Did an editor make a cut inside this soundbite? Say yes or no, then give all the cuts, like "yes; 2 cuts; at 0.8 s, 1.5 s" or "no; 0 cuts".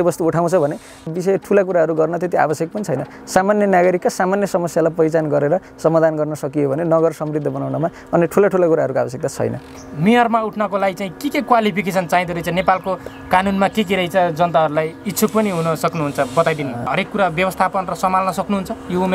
yes; 3 cuts; at 1.1 s, 9.6 s, 16.9 s